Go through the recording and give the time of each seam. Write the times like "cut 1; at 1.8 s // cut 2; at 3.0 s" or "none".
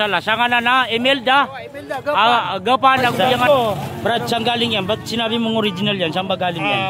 cut 1; at 3.1 s